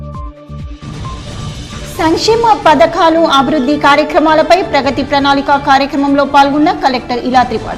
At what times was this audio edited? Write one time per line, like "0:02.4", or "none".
none